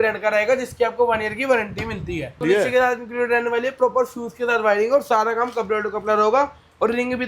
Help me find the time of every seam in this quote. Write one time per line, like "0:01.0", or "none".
0:02.4